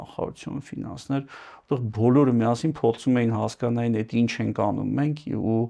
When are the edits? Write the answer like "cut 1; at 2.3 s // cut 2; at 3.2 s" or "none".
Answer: none